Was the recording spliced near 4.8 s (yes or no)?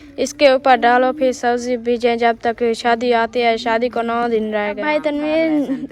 yes